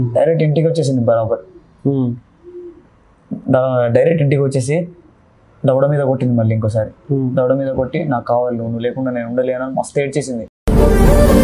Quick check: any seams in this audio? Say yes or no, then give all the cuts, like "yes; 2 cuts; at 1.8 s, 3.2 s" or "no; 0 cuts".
no; 0 cuts